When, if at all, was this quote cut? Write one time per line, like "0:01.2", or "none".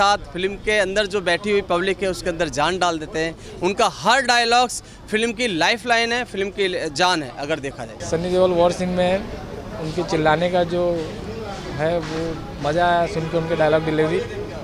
0:07.9